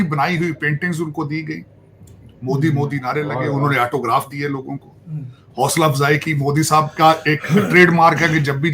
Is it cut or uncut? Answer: uncut